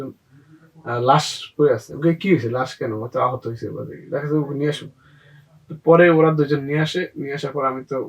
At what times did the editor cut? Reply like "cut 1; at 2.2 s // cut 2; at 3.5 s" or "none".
none

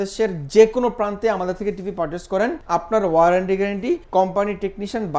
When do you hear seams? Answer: cut 1; at 2.6 s // cut 2; at 4.0 s

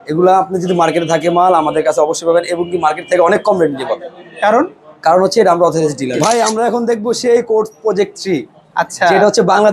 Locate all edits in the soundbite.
cut 1; at 6.1 s

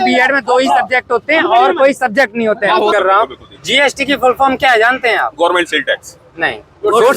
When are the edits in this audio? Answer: cut 1; at 2.9 s

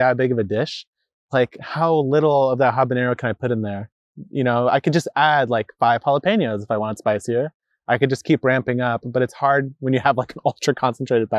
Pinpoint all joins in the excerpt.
none

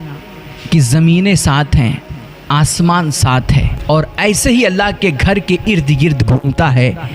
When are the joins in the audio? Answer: cut 1; at 3.7 s

